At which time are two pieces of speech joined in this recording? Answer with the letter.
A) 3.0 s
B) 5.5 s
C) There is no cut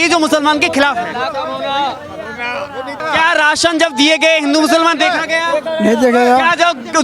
A